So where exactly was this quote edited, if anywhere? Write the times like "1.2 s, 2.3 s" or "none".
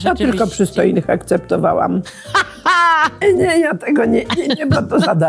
3.2 s